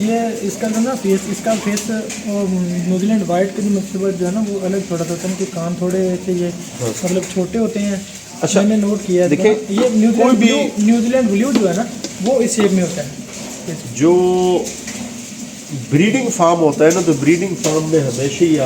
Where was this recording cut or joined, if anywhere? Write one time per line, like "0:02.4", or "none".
none